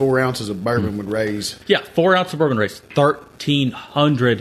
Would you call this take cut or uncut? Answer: cut